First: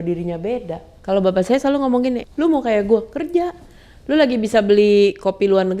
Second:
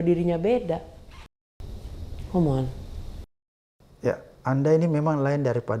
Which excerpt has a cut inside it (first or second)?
first